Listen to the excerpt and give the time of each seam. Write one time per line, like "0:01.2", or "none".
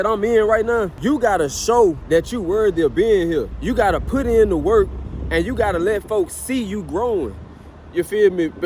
0:00.9
0:02.0
0:03.5